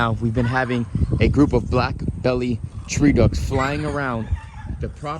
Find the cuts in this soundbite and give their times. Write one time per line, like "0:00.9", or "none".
none

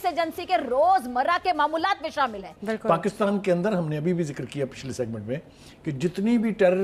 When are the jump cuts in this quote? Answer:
0:02.5

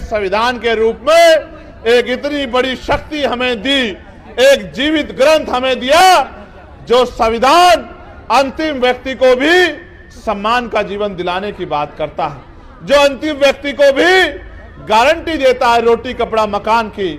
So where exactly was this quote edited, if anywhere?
none

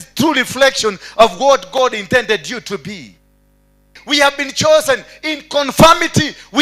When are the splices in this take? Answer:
0:03.9

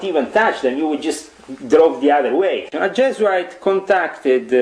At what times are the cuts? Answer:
0:02.7

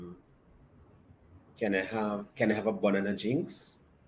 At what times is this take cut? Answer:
none

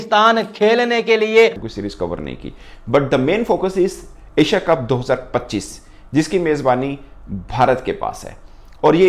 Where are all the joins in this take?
0:01.7

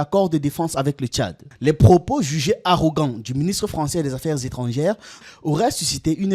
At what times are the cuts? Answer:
0:01.4
0:05.1

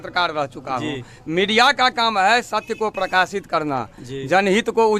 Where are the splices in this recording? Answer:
none

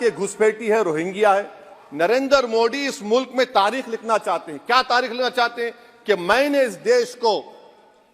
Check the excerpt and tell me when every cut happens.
0:01.8

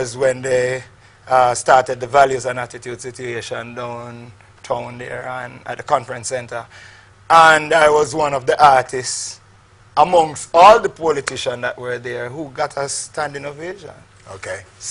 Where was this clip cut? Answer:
0:11.7

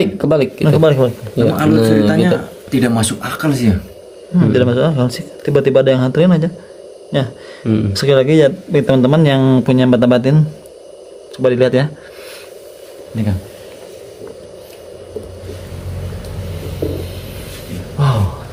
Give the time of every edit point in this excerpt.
none

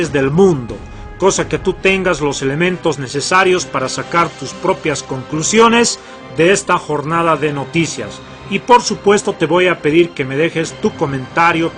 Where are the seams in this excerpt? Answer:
0:05.5

